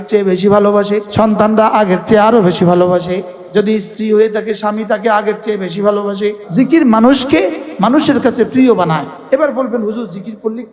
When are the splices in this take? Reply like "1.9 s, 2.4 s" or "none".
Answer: 1.1 s, 3.3 s, 6.4 s, 9.1 s